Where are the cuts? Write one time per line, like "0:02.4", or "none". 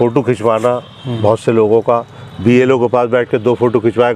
none

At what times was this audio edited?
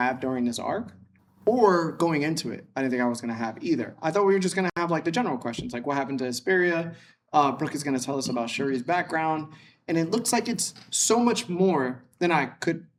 none

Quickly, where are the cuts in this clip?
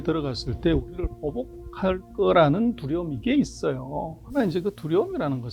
0:04.3

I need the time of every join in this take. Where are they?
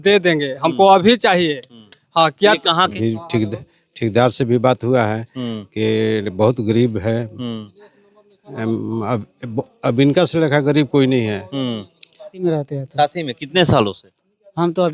0:02.9
0:12.3

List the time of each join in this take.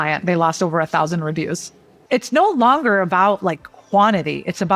0:02.0

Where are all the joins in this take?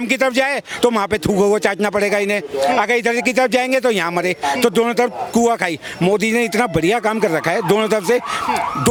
none

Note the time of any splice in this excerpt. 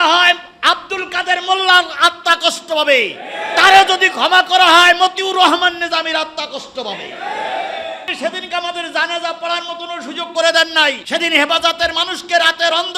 0:08.1
0:11.0

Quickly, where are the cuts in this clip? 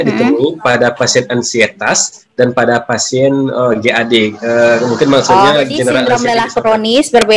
0:06.0

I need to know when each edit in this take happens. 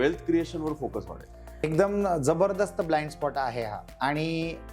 0:01.6
0:03.8

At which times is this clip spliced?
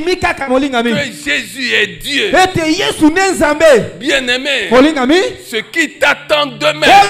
none

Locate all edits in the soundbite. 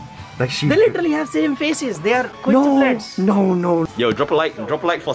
0:02.3
0:03.9

